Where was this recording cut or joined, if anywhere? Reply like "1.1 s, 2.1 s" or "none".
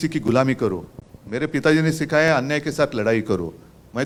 none